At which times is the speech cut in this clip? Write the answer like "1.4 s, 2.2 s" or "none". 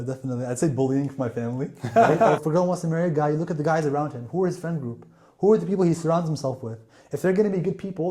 2.3 s

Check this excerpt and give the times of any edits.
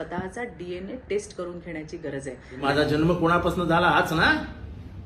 2.4 s

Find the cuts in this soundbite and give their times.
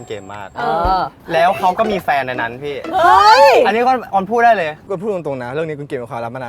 1.2 s, 4.8 s

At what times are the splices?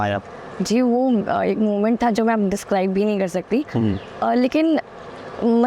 none

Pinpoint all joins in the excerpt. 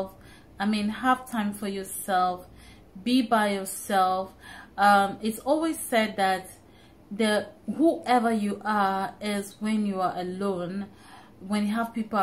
none

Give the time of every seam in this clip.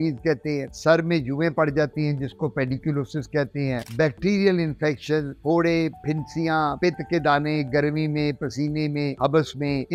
none

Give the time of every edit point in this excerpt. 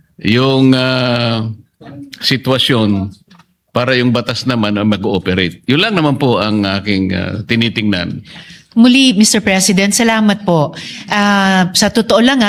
none

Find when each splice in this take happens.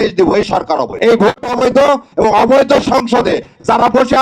0.9 s

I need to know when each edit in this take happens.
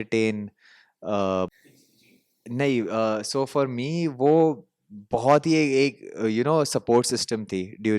1.5 s

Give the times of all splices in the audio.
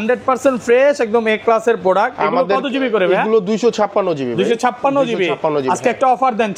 none

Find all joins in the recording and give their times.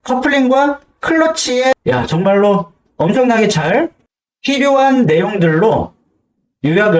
1.7 s

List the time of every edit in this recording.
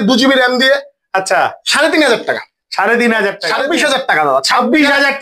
3.5 s

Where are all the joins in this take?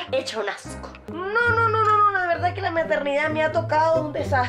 1.0 s

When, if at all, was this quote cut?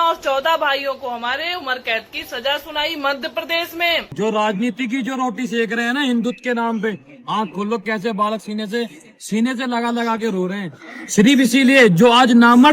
4.1 s

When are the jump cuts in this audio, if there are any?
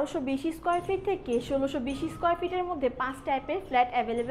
none

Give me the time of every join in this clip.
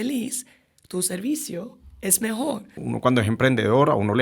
2.8 s

